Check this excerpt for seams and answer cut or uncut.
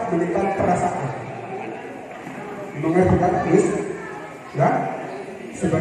uncut